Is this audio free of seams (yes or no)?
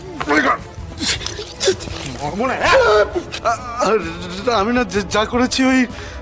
no